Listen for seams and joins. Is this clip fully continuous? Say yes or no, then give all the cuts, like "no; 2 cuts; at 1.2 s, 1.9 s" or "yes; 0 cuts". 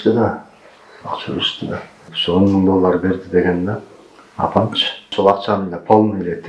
no; 2 cuts; at 2.0 s, 5.1 s